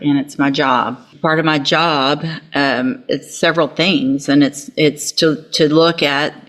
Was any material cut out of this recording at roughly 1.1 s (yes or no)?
yes